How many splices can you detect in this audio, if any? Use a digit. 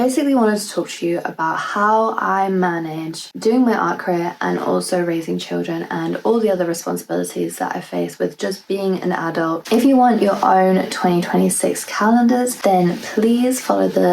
3